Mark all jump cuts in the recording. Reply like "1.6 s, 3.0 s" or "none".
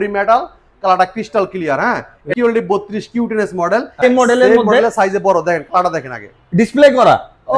2.3 s, 4.0 s